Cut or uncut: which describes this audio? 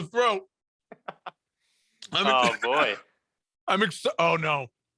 uncut